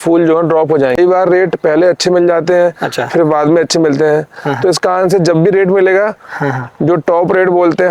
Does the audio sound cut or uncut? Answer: cut